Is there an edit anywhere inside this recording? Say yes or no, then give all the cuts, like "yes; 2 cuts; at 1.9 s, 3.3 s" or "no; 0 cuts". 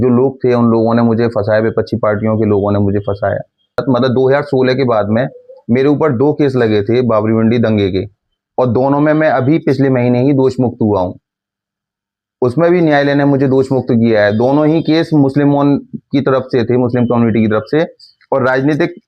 yes; 1 cut; at 3.8 s